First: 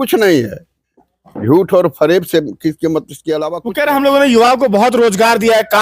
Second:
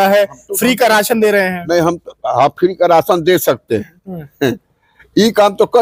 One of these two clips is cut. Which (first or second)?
first